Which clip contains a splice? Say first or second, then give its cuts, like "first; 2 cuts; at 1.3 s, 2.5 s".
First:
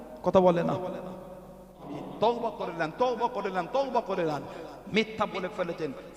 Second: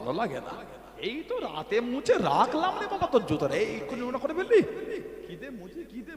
first; 1 cut; at 1.9 s